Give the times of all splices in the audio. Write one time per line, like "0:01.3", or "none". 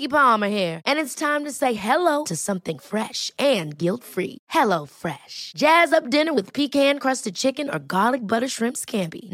none